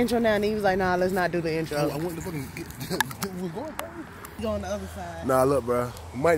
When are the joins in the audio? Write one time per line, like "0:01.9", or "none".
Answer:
0:04.4